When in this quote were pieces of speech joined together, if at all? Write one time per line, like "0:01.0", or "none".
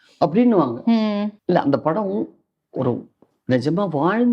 0:01.3